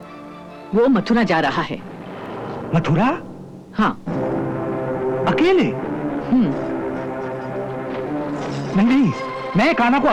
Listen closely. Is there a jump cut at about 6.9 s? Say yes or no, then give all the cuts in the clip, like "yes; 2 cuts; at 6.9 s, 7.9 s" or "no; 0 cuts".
no; 0 cuts